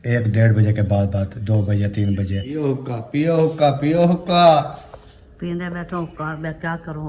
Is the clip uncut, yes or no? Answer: no